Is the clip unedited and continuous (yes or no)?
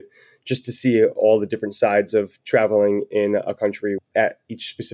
no